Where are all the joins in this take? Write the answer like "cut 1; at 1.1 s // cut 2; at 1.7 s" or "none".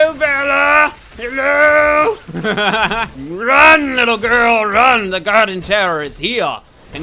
cut 1; at 3.2 s